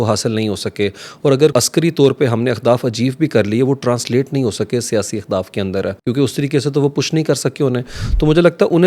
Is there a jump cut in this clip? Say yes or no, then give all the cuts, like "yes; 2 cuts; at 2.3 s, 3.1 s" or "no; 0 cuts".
yes; 2 cuts; at 1.5 s, 6.0 s